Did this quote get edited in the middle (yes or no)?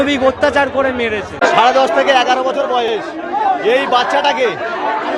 yes